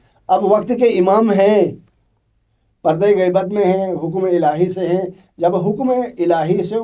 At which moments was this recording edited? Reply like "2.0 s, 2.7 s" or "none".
none